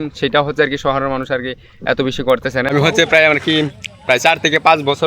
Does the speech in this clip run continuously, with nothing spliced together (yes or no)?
no